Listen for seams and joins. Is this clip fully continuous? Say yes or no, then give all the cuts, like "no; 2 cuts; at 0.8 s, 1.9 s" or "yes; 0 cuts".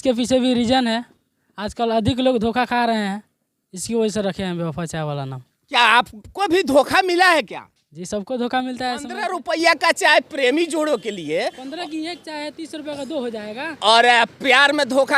no; 1 cut; at 9.3 s